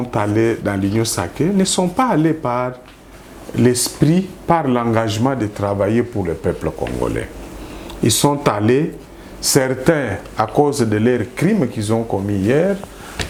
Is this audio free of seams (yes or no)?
yes